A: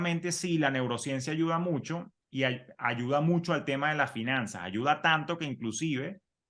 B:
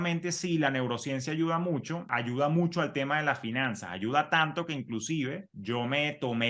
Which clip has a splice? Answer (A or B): B